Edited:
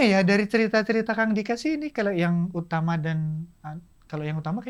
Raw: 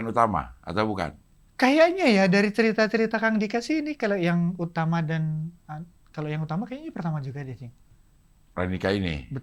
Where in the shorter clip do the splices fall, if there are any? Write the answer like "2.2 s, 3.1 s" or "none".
none